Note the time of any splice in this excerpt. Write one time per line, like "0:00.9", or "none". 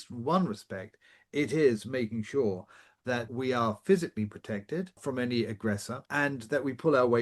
0:03.3
0:05.0
0:06.0